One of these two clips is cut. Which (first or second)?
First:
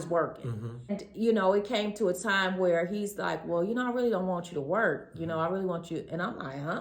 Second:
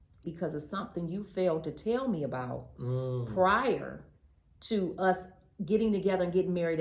first